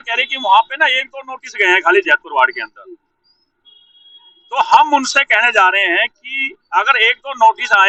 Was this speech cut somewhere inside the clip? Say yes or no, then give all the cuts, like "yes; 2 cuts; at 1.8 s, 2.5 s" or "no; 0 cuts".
no; 0 cuts